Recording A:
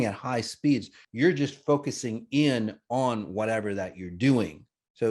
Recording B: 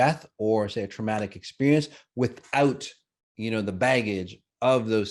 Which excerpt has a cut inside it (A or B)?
A